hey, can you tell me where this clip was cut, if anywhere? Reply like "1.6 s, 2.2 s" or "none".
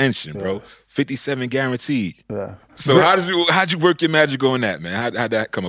2.7 s